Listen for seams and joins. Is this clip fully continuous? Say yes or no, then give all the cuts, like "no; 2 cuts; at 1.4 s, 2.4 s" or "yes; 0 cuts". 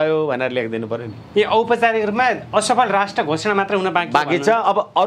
yes; 0 cuts